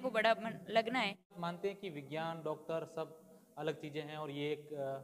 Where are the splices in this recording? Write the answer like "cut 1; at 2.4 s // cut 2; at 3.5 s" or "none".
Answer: cut 1; at 1.4 s